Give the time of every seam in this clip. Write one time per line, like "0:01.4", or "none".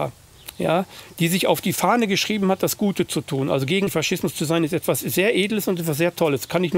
0:03.9